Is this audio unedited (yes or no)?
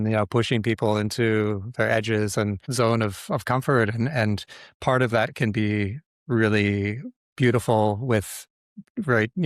no